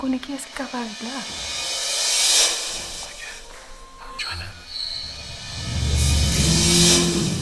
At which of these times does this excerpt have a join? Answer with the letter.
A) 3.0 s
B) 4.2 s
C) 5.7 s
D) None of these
B